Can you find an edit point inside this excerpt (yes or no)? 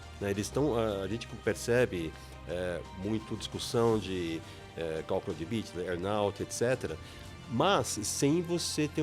no